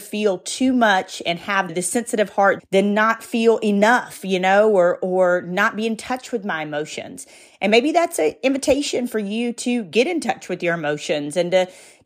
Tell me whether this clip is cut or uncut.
uncut